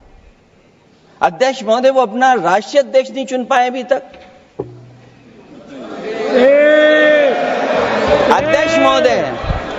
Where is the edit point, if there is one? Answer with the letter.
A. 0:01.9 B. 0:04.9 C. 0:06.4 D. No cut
D